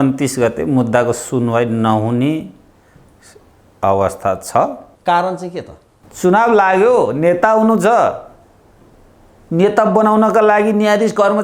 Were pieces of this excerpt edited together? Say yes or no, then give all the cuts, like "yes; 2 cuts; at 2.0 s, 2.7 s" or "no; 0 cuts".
yes; 1 cut; at 4.9 s